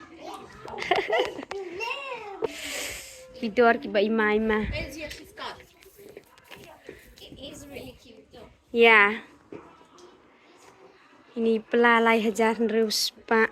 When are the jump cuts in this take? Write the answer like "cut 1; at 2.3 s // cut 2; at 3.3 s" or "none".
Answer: cut 1; at 2.5 s